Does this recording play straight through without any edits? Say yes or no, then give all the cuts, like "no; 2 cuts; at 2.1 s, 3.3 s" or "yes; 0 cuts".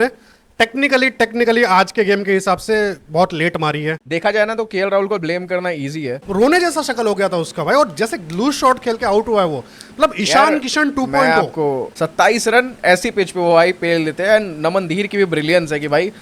no; 3 cuts; at 4.0 s, 6.3 s, 11.9 s